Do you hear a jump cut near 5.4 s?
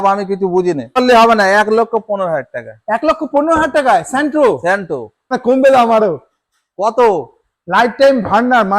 yes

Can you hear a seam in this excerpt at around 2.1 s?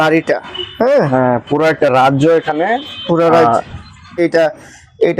no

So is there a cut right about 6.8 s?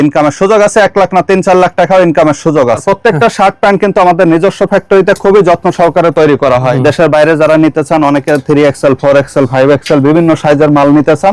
yes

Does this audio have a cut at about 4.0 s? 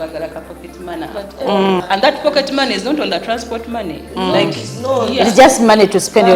no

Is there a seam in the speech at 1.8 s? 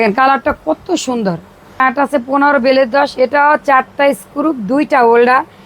yes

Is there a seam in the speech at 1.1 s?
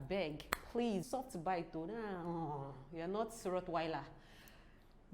yes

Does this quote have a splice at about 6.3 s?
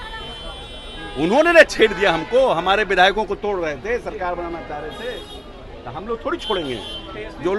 no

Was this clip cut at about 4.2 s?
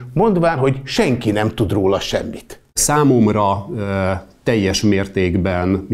no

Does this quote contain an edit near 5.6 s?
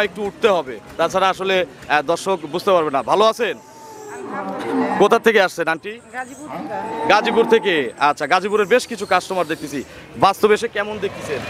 no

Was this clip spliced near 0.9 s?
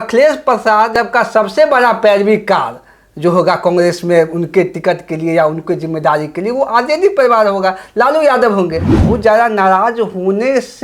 yes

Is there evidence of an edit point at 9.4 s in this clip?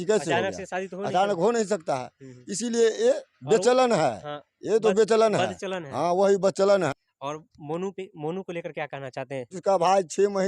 yes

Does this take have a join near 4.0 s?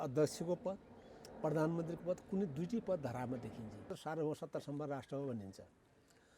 yes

